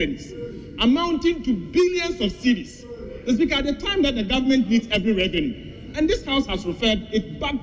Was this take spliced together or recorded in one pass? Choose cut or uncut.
uncut